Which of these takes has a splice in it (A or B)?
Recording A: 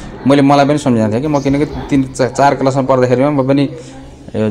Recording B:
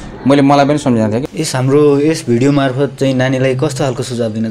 B